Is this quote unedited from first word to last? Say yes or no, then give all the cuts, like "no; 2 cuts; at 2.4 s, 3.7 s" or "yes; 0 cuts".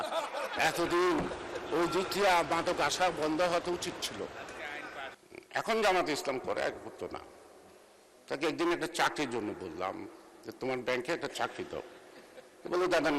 no; 1 cut; at 5.2 s